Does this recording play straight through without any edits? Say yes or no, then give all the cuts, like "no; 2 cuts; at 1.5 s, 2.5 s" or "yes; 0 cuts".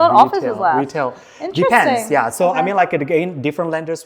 yes; 0 cuts